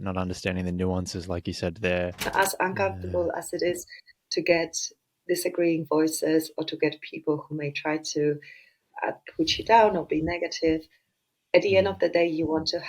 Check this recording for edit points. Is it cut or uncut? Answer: cut